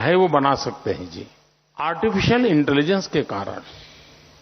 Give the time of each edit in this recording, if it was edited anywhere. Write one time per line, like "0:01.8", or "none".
0:01.9